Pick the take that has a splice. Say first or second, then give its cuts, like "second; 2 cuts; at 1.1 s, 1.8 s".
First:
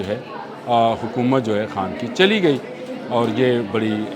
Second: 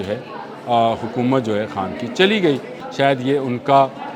second; 1 cut; at 2.8 s